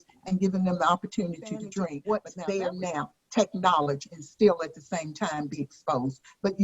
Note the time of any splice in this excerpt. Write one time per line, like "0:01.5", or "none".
0:02.0